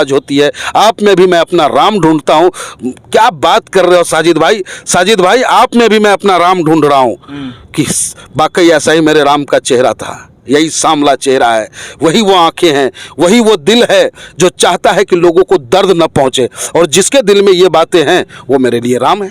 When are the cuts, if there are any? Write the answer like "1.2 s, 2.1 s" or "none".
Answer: none